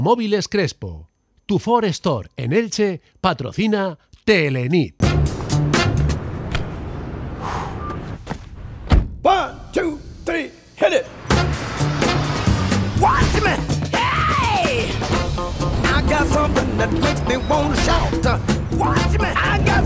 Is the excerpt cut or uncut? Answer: cut